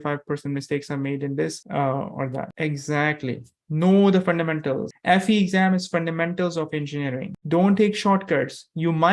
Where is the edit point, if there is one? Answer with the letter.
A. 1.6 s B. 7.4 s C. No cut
B